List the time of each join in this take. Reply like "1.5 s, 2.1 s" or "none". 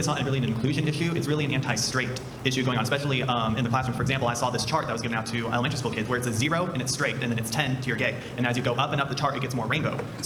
none

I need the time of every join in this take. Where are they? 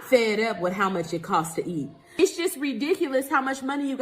2.0 s

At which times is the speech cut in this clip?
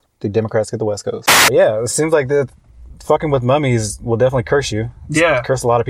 1.5 s

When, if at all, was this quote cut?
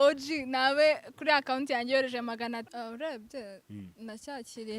2.6 s

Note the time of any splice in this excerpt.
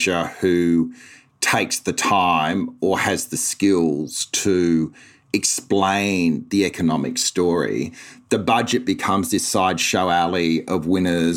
none

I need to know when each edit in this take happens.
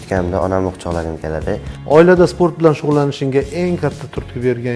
1.7 s

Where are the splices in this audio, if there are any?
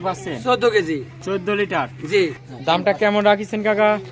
2.4 s

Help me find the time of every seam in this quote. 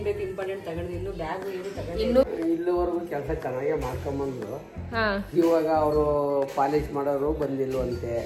2.2 s

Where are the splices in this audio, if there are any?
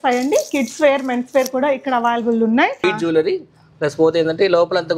2.8 s

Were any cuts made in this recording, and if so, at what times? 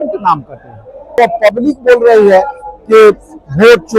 1.1 s

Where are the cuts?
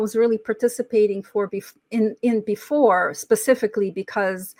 none

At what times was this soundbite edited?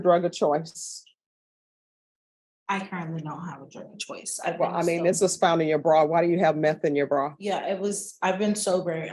none

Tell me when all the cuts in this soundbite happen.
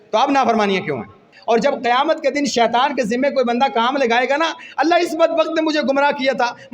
1.3 s

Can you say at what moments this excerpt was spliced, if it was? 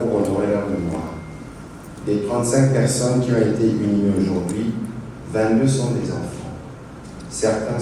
none

